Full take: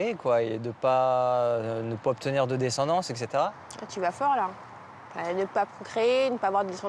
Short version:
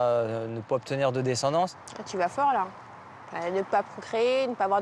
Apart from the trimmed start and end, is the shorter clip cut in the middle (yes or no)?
yes